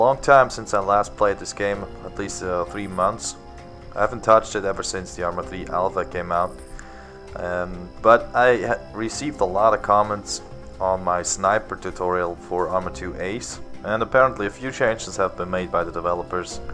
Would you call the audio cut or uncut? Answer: cut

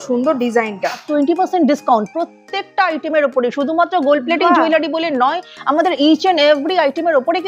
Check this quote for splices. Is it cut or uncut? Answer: cut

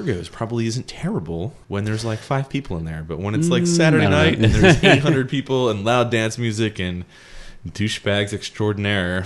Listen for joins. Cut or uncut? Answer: cut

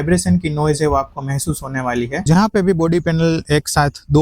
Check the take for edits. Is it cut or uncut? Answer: cut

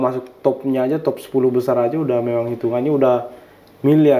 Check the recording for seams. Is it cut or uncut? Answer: uncut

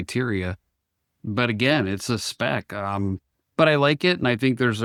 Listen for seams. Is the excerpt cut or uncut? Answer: uncut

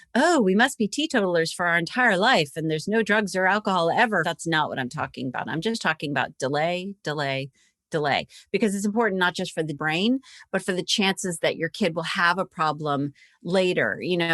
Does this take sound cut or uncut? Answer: cut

